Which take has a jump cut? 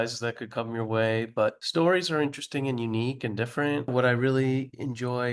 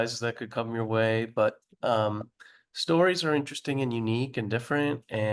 first; 2 cuts; at 1.6 s, 3.9 s

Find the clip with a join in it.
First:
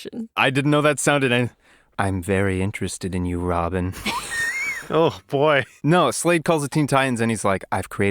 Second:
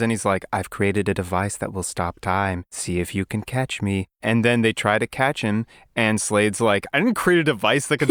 first; 1 cut; at 5.8 s

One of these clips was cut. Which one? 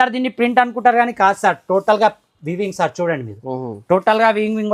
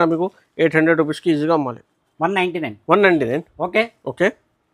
second; 1 cut; at 2.0 s

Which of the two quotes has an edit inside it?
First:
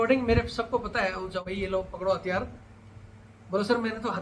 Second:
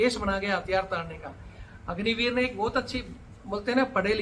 first; 1 cut; at 1.4 s

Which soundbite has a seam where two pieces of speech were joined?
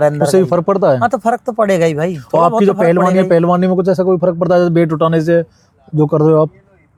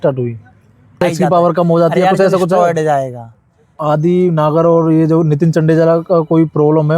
second; 2 cuts; at 1.0 s, 3.7 s

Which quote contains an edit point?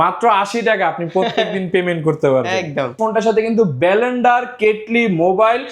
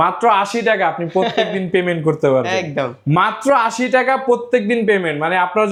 first; 1 cut; at 3.0 s

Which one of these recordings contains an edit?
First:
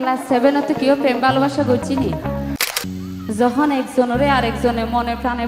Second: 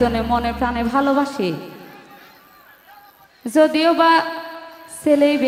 first; 1 cut; at 2.7 s

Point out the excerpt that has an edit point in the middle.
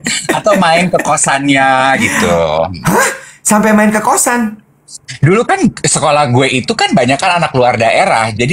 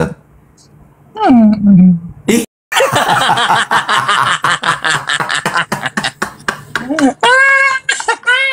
second; 1 cut; at 2.5 s

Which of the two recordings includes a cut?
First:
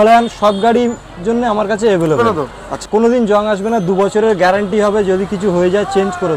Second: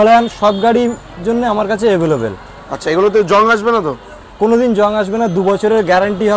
first; 1 cut; at 2.2 s

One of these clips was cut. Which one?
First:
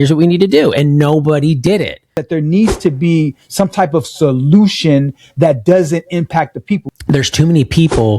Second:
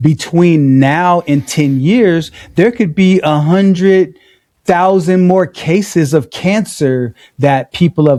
first; 2 cuts; at 2.2 s, 6.8 s

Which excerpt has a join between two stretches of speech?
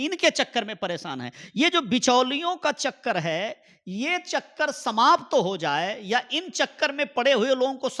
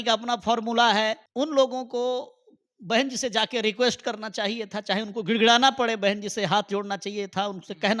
second; 1 cut; at 1.2 s

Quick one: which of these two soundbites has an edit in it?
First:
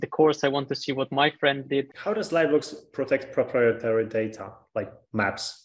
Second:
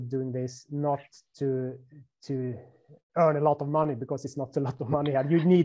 first; 1 cut; at 1.9 s

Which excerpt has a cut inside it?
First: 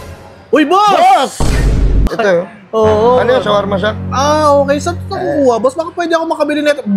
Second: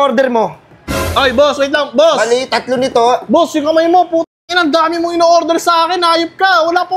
first; 1 cut; at 2.1 s

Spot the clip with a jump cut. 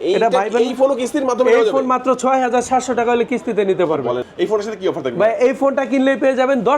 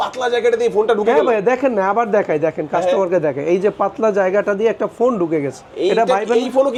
first; 1 cut; at 4.3 s

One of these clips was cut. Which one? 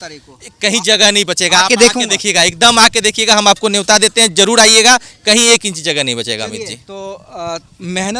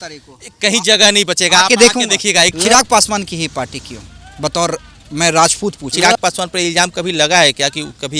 second; 2 cuts; at 2.5 s, 5.9 s

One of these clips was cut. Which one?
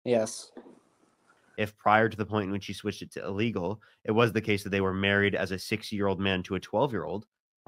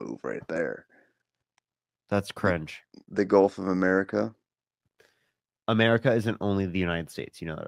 first; 1 cut; at 1.4 s

